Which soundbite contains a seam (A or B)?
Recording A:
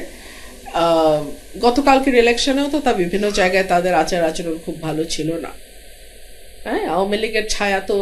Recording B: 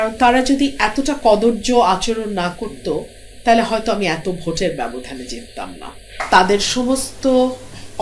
B